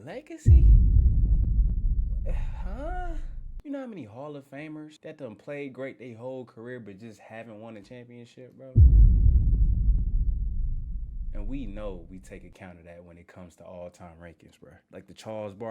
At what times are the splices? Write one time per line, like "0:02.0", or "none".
0:03.6